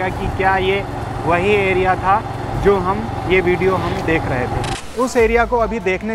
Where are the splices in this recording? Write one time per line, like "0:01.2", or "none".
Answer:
0:04.7

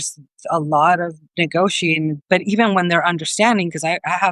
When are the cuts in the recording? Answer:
0:02.2

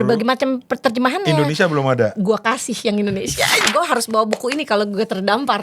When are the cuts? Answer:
0:03.6

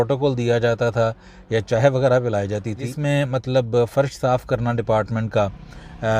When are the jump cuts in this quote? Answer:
0:02.9

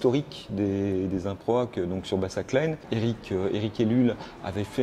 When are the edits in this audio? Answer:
0:02.8

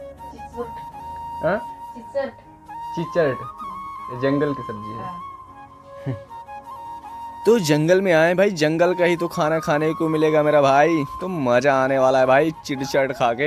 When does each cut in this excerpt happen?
none

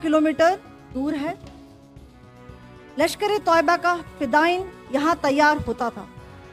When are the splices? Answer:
0:01.4
0:02.9

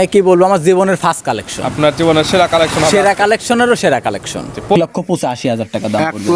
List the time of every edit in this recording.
0:04.8

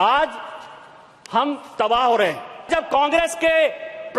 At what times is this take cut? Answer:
0:02.7

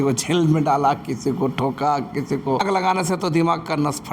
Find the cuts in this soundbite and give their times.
0:02.6

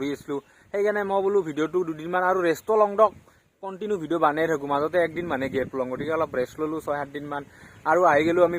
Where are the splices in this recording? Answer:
none

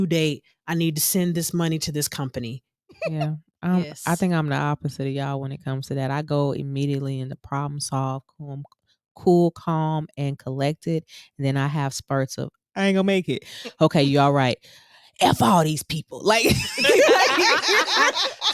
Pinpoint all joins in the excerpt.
0:03.0

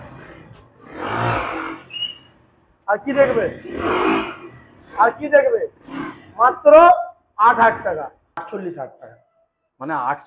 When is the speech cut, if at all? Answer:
0:08.5

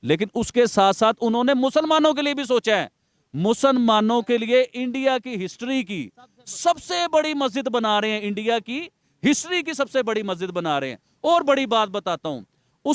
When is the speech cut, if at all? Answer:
none

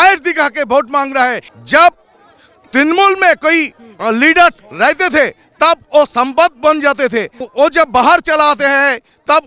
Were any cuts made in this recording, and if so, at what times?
0:01.5
0:07.4

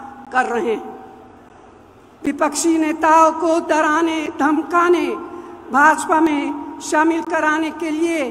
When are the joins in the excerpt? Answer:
none

